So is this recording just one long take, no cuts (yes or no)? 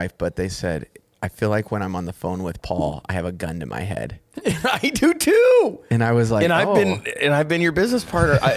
yes